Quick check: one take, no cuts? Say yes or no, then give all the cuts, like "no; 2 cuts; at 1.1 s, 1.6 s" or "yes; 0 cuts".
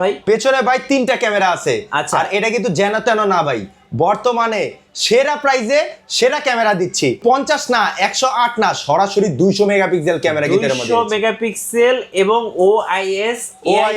no; 1 cut; at 7.2 s